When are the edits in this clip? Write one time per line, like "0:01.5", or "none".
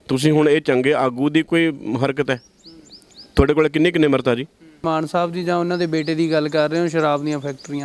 0:04.8